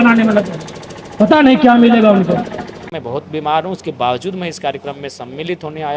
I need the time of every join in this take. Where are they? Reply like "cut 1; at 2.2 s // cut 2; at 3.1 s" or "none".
cut 1; at 2.9 s